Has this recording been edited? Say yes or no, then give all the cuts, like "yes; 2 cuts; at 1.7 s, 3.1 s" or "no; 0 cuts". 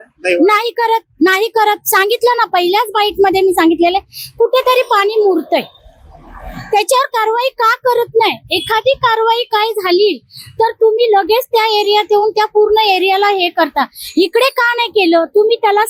no; 0 cuts